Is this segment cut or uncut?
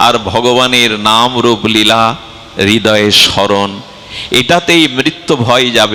uncut